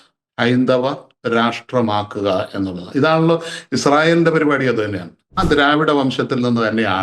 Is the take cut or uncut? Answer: cut